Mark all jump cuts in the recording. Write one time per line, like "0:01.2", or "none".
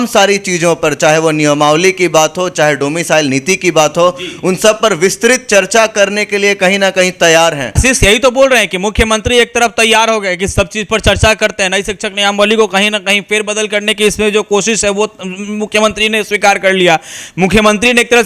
0:07.8